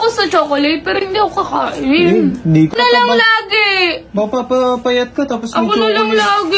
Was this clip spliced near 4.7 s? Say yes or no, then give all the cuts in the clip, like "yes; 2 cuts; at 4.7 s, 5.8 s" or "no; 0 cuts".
no; 1 cut; at 2.7 s